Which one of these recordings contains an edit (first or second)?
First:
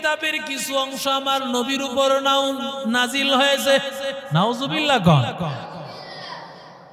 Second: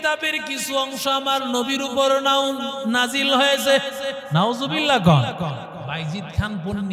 second